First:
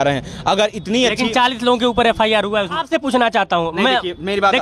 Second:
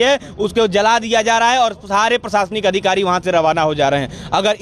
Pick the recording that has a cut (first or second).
first